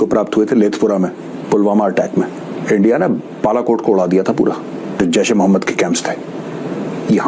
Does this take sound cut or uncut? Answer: cut